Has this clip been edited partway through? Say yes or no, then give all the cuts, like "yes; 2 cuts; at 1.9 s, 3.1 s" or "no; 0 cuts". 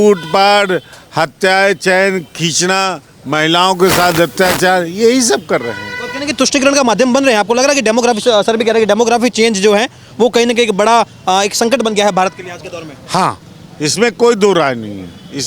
no; 0 cuts